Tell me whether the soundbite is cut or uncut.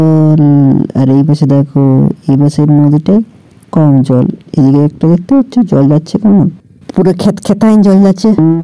uncut